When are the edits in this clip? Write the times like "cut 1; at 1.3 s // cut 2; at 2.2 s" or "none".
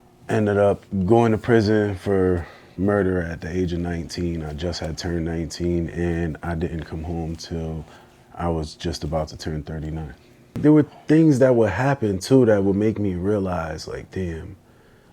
cut 1; at 10.6 s